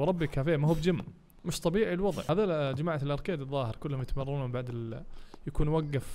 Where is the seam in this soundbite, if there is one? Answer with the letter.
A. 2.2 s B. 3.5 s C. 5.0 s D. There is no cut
A